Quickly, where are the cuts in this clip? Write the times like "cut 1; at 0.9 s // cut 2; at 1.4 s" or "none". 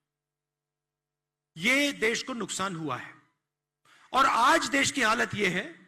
none